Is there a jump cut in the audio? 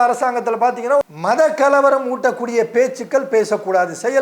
yes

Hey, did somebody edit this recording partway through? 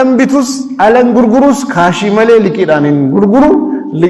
no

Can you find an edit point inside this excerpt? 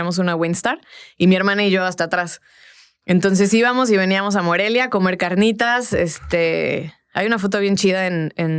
no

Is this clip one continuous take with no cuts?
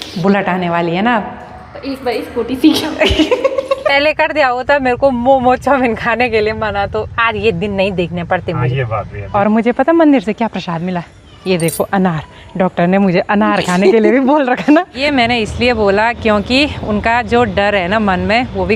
no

